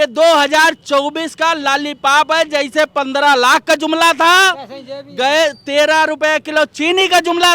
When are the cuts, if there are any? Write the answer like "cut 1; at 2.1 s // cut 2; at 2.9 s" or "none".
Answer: none

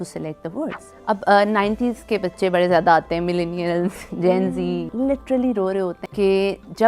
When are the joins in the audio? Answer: cut 1; at 0.9 s // cut 2; at 4.9 s // cut 3; at 6.0 s

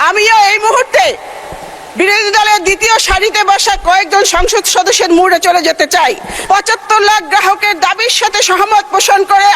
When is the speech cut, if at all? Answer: cut 1; at 6.3 s

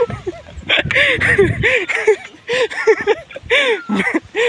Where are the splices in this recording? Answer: none

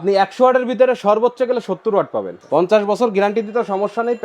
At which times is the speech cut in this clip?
cut 1; at 2.3 s

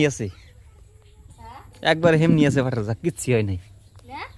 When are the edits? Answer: cut 1; at 1.3 s

